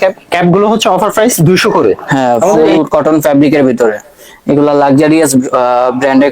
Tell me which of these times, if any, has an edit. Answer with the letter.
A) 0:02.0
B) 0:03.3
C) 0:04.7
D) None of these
A